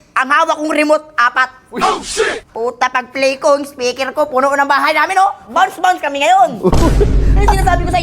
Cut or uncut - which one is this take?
uncut